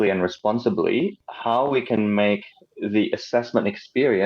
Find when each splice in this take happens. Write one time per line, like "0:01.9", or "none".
0:01.2